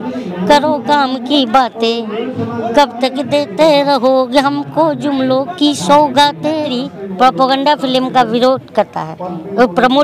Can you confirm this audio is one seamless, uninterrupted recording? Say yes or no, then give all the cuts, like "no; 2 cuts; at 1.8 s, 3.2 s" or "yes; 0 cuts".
no; 1 cut; at 6.8 s